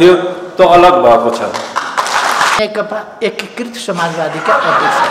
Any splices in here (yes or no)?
yes